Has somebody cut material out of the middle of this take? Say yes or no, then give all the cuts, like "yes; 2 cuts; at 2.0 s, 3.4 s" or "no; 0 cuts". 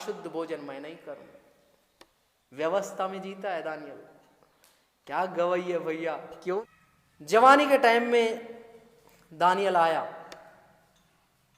yes; 1 cut; at 6.6 s